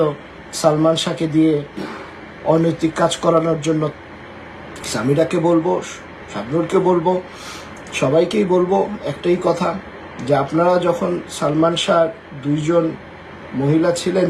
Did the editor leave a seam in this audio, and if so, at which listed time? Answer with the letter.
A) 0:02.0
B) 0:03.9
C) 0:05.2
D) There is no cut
B